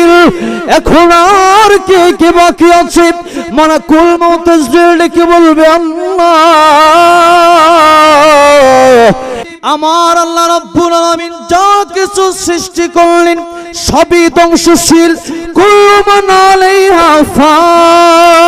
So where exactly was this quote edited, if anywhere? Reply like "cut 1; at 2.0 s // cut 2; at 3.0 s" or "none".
cut 1; at 9.3 s